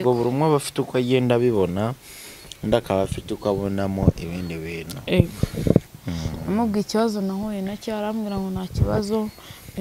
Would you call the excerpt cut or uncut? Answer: cut